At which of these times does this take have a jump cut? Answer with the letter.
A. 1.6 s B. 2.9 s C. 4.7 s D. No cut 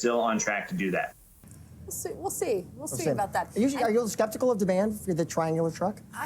A